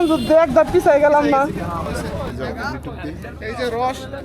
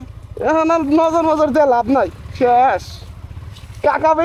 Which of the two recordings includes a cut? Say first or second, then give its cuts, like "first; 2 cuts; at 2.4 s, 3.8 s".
first; 1 cut; at 2.0 s